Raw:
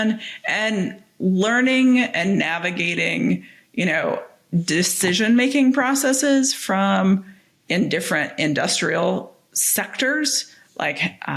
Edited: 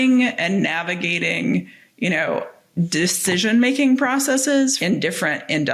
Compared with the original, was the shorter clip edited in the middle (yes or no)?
yes